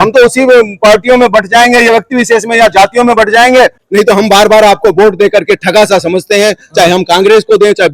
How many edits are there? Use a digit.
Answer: 1